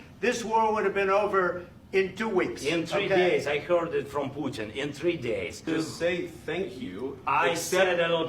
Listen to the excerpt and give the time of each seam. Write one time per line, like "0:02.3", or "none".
0:05.5